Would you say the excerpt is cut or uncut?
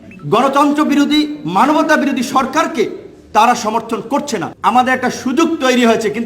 cut